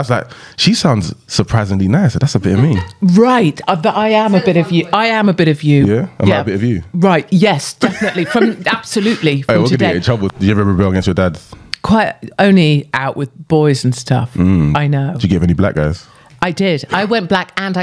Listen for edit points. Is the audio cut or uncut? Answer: cut